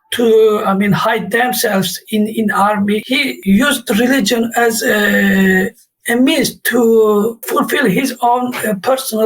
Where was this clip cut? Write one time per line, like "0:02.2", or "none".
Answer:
0:03.2
0:07.4